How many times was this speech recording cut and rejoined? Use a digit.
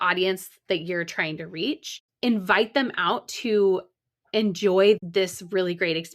2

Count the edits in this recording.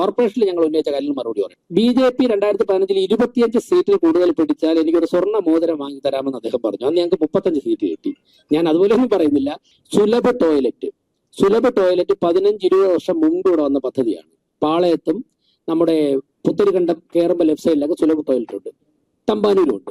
2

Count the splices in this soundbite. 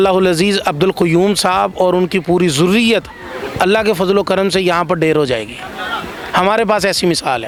0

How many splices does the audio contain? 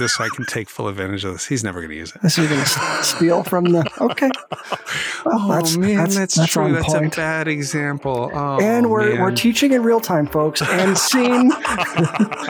1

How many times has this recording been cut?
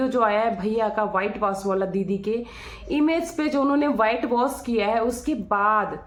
0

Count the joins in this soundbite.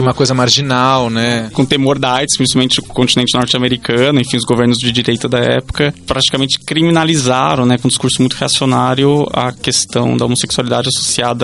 2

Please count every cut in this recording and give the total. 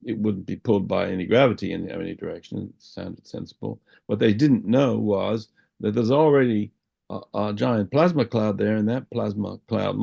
0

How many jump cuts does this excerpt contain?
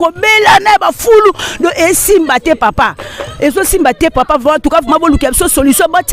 0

